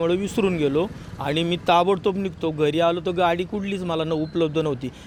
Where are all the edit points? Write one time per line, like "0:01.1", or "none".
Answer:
none